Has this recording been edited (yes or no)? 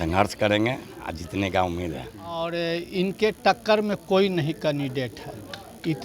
yes